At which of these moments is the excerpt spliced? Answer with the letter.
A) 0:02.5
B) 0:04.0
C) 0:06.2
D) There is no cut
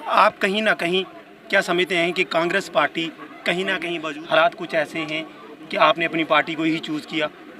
B